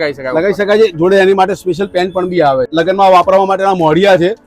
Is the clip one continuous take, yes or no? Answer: no